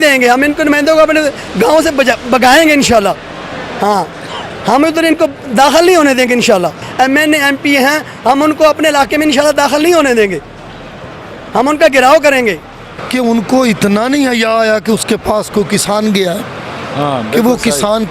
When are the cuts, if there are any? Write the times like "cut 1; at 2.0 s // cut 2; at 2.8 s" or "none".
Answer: cut 1; at 6.8 s // cut 2; at 13.0 s